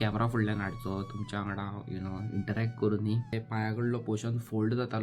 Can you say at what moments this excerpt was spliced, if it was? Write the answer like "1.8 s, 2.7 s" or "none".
3.4 s